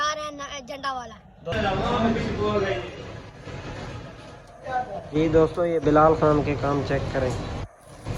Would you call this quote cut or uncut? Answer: cut